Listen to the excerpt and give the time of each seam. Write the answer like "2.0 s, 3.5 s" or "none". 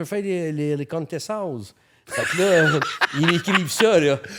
none